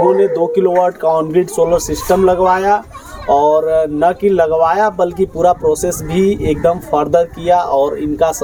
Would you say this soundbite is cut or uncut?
uncut